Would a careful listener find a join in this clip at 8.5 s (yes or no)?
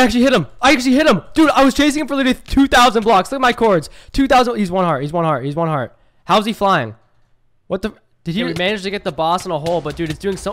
yes